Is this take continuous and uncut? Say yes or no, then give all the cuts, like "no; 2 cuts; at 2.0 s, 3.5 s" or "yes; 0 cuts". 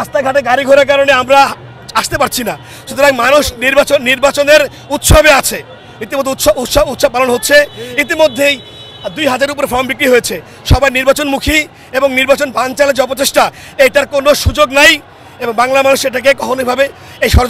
yes; 0 cuts